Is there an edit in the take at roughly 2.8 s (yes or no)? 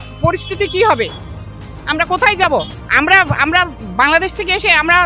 yes